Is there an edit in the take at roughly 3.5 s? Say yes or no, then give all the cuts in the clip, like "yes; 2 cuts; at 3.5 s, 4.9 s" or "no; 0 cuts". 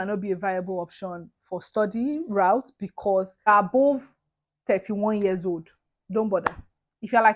yes; 1 cut; at 3.5 s